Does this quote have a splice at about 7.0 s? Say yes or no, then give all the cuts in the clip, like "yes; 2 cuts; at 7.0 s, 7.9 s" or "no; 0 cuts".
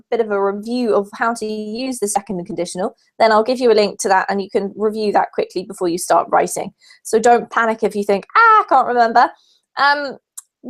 yes; 1 cut; at 7.0 s